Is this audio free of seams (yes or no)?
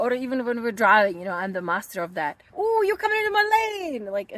no